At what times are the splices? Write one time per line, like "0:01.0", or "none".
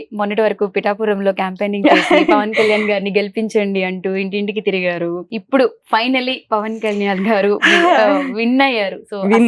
0:05.3